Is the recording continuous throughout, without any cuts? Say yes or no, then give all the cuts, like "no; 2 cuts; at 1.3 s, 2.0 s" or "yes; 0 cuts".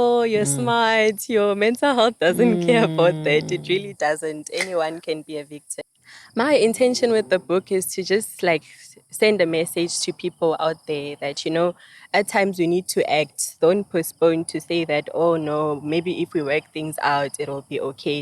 no; 1 cut; at 5.7 s